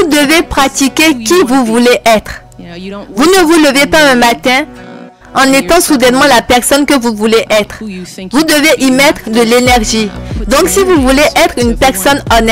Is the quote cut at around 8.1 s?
no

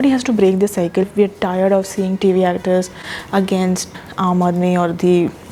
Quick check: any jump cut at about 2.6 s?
no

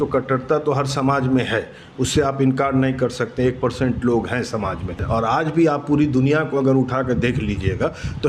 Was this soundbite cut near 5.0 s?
yes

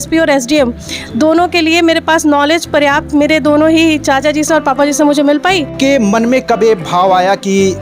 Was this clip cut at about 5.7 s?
yes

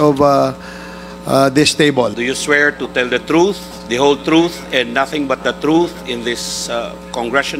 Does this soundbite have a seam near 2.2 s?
yes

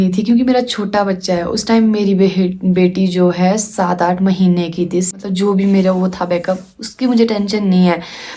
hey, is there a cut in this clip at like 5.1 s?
yes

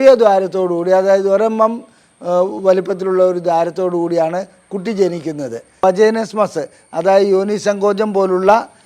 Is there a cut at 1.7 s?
no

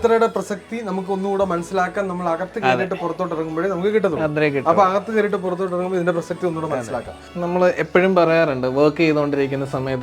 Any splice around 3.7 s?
no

